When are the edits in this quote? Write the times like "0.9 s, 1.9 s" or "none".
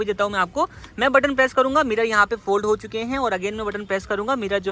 none